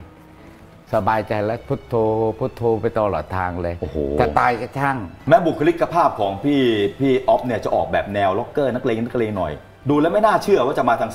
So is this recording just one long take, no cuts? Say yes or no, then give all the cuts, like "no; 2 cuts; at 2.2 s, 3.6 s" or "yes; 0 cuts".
no; 1 cut; at 5.1 s